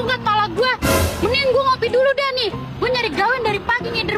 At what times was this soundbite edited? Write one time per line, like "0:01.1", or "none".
0:01.1